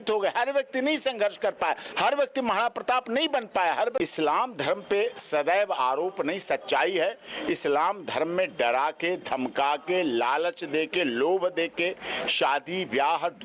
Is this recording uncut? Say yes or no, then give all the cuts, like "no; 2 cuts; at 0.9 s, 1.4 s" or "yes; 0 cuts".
no; 1 cut; at 4.0 s